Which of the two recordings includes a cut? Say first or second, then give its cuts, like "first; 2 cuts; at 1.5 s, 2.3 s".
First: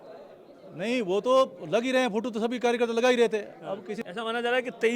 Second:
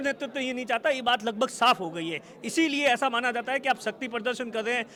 first; 1 cut; at 3.9 s